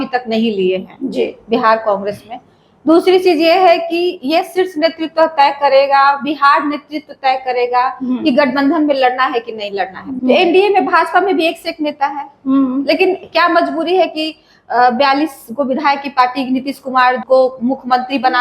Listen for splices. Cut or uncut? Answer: cut